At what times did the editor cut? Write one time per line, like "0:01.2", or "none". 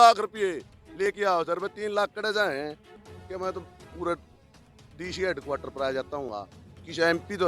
none